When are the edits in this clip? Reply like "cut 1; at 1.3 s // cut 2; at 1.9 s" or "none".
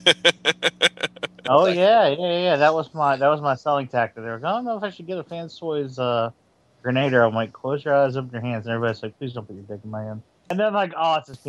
cut 1; at 10.5 s

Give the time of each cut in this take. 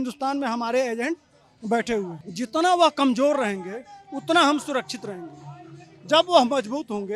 cut 1; at 2.2 s

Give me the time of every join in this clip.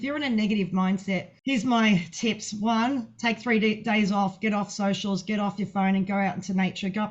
cut 1; at 1.3 s

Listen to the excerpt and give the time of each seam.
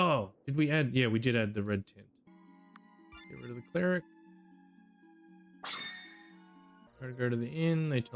cut 1; at 2.3 s // cut 2; at 6.9 s

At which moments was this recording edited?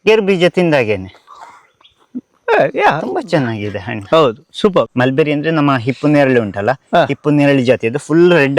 cut 1; at 4.9 s

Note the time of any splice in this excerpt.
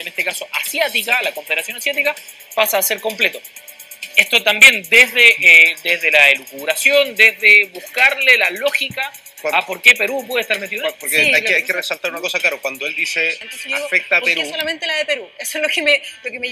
cut 1; at 14.5 s

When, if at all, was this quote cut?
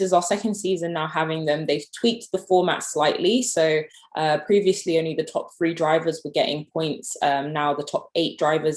none

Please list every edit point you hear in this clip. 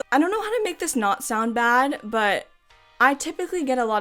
none

